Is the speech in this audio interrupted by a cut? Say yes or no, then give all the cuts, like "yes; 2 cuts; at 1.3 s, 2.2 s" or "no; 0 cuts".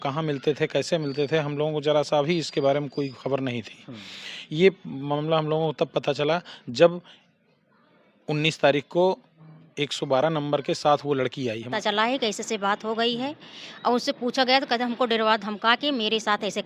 yes; 1 cut; at 11.7 s